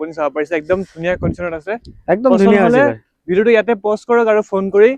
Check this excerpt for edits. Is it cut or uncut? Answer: uncut